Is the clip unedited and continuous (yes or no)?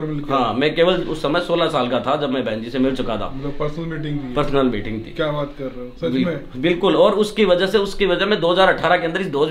yes